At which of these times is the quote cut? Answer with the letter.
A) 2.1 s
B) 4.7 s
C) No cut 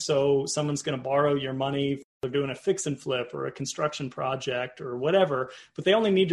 A